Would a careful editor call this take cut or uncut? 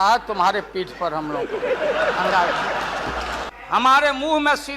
cut